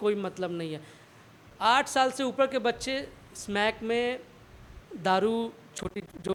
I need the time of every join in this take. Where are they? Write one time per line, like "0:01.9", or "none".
none